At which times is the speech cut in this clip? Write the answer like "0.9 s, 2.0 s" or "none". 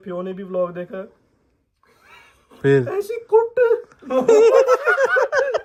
none